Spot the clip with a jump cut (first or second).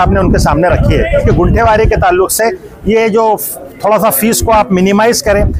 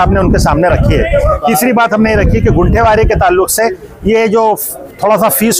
first